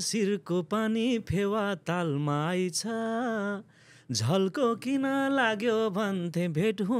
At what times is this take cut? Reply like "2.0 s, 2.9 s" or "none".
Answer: none